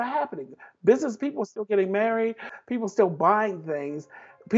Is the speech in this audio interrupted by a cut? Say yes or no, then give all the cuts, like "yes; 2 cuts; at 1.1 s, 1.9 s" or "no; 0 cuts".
yes; 1 cut; at 2.5 s